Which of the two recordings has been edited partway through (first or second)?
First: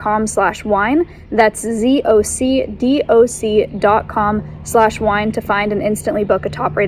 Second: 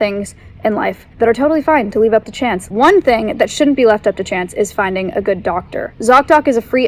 second